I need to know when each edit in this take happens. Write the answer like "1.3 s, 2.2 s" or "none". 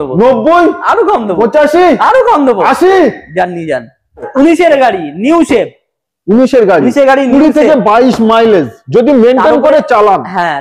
4.3 s